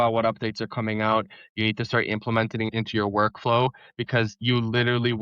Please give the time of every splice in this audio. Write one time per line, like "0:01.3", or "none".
0:02.7
0:04.4